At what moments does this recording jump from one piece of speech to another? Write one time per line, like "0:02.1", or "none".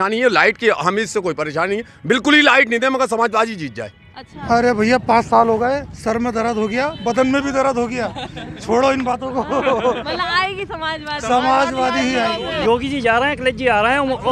0:04.3
0:12.6